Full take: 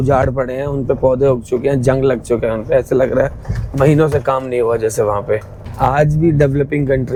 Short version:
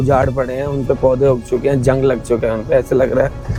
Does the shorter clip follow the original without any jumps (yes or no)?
yes